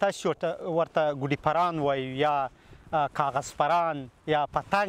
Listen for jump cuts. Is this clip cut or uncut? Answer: uncut